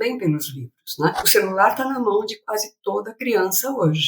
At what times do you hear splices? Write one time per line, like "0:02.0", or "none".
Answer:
0:01.2